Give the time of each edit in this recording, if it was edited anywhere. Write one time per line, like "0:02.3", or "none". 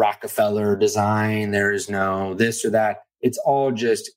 0:03.1